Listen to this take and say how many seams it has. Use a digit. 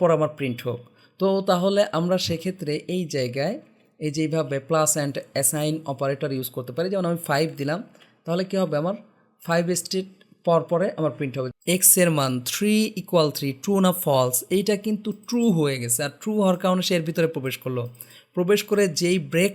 1